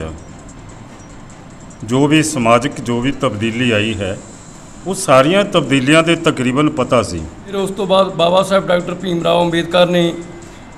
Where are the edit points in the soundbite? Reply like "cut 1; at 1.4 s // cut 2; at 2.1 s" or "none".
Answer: cut 1; at 7.5 s